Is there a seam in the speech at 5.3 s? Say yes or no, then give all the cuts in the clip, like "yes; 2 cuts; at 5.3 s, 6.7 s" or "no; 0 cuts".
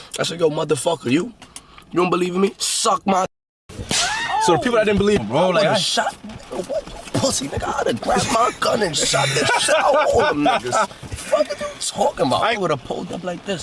yes; 2 cuts; at 5.3 s, 12.6 s